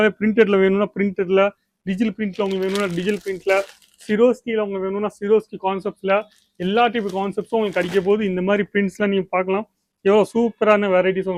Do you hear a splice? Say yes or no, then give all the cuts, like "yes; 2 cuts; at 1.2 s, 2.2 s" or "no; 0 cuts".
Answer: no; 0 cuts